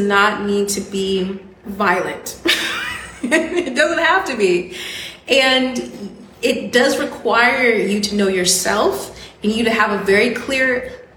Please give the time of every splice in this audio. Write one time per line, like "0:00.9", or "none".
0:01.6